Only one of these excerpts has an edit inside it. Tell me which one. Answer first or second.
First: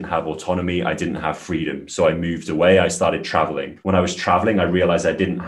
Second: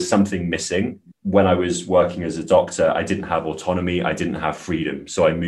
second